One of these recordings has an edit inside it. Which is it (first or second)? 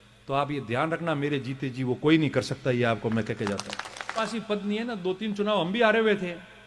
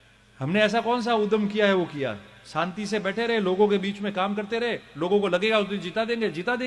first